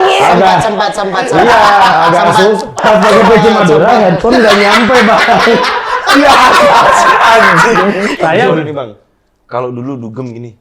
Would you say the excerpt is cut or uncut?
cut